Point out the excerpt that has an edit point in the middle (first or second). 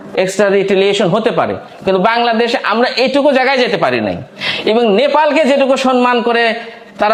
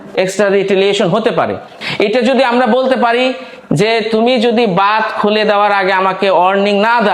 second